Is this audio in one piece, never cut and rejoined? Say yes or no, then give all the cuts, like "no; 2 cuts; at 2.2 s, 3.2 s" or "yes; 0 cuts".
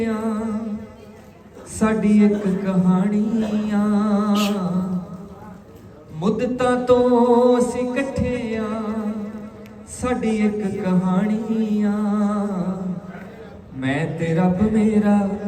yes; 0 cuts